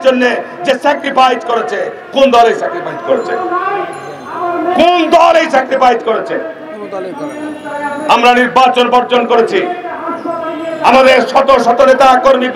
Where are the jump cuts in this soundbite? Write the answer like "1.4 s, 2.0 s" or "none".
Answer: none